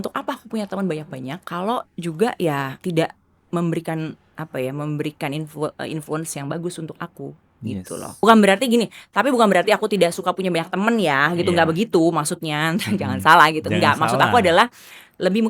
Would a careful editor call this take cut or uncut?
cut